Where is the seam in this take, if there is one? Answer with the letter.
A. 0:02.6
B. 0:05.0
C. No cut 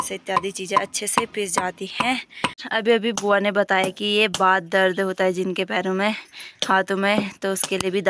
A